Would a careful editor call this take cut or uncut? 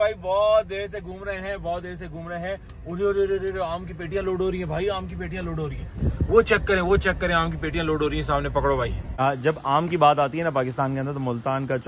cut